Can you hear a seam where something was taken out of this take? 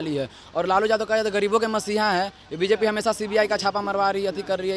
no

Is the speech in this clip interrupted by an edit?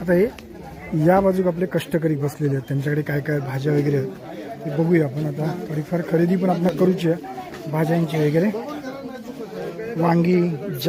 no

